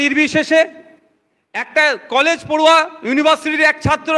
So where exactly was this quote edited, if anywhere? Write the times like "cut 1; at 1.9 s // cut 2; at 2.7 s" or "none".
none